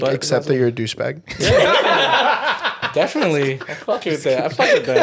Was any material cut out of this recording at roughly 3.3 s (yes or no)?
no